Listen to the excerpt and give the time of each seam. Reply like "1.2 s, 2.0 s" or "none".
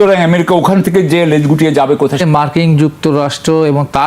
2.2 s